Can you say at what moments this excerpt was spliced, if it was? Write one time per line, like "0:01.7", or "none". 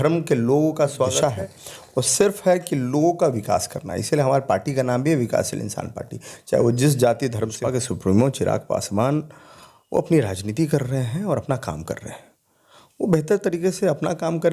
0:01.1
0:07.6